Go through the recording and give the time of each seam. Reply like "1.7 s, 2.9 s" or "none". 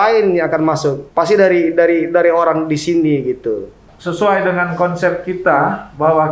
1.0 s, 3.8 s